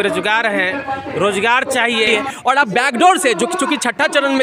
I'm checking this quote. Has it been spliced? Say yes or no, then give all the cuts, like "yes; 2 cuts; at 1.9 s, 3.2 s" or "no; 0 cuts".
yes; 1 cut; at 2.1 s